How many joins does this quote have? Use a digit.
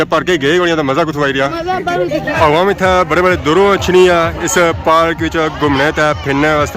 1